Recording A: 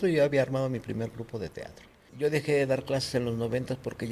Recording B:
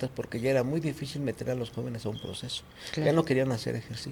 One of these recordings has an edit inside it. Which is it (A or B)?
A